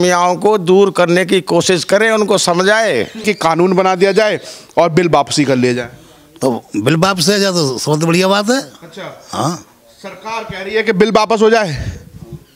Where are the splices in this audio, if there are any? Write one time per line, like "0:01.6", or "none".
0:03.2